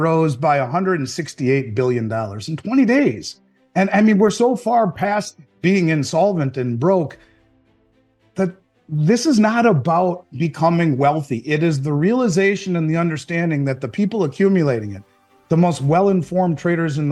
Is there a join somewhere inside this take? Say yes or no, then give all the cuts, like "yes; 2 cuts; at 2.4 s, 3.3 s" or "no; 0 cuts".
no; 0 cuts